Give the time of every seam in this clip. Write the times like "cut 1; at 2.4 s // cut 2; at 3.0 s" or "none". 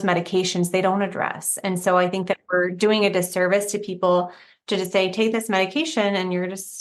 none